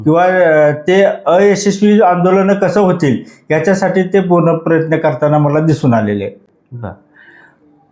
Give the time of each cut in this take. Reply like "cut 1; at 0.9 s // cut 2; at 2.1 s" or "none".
none